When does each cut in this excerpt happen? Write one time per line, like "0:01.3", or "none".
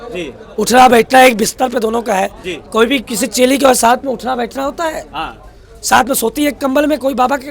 none

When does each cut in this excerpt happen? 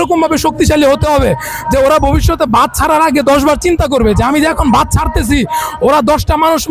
none

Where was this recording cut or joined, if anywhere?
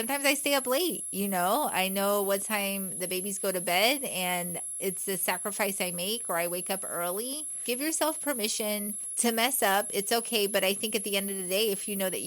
0:07.6
0:09.0

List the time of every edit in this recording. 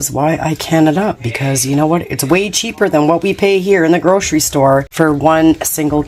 0:04.9

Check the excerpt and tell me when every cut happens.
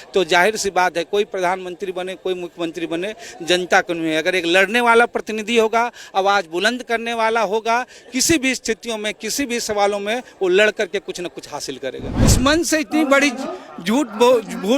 0:12.1

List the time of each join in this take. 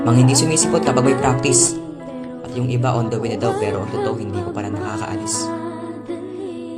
none

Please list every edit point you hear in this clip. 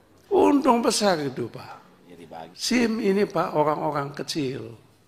0:02.5

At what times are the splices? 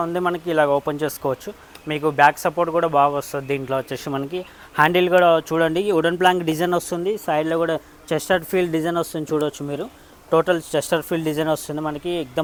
none

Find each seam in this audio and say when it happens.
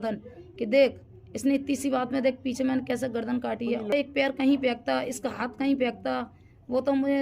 0:03.9

